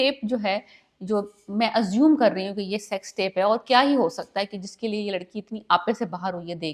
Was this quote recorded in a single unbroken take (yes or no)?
yes